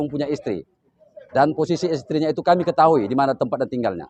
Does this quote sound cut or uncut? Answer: uncut